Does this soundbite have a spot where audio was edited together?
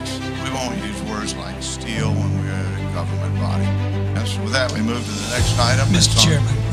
no; 0 cuts

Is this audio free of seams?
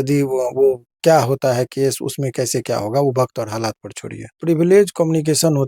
no; 1 cut; at 4.3 s

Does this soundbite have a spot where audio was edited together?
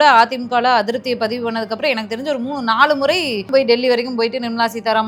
yes; 1 cut; at 3.5 s

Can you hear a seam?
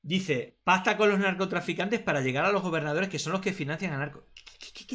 no; 0 cuts

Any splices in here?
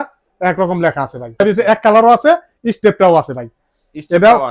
yes; 1 cut; at 1.4 s

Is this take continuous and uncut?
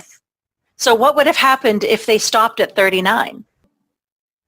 no; 1 cut; at 3.6 s

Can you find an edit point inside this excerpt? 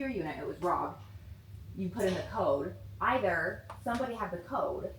no; 0 cuts

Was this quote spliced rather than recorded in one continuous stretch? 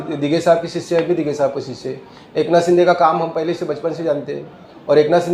no; 0 cuts

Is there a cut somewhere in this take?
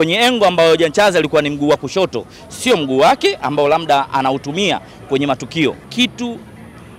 yes; 1 cut; at 5.8 s

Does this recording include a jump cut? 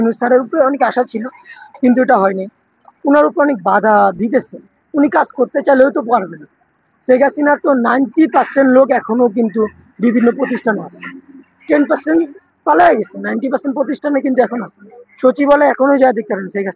no; 0 cuts

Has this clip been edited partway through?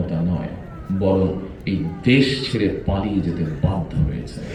no; 0 cuts

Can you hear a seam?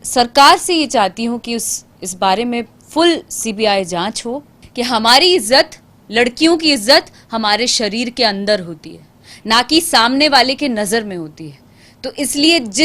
yes; 1 cut; at 4.5 s

